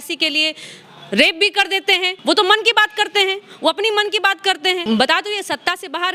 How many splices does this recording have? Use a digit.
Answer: 2